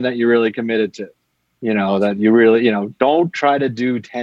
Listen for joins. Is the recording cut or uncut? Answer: uncut